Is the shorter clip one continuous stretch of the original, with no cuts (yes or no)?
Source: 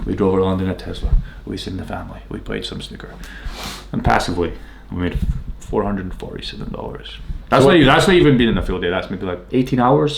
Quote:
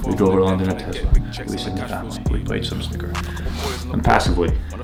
yes